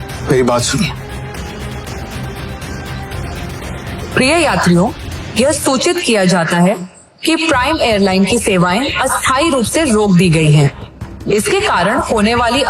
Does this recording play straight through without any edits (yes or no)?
no